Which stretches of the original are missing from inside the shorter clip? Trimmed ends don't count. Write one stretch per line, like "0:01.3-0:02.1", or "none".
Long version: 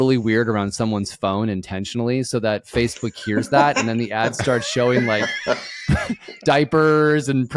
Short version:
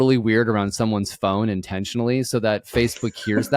none